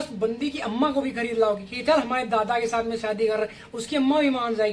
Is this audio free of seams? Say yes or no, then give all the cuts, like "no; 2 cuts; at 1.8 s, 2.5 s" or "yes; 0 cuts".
yes; 0 cuts